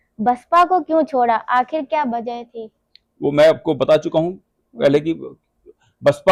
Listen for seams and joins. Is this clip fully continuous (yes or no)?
yes